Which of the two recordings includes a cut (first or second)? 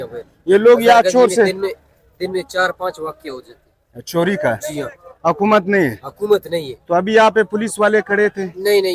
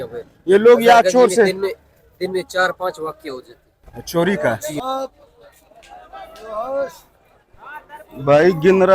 second